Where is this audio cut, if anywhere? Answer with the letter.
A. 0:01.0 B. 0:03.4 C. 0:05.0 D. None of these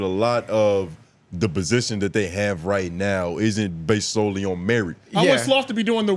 C